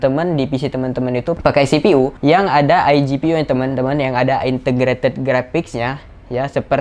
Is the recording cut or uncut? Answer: cut